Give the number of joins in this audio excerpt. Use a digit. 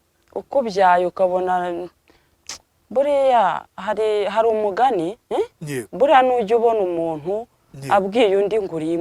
0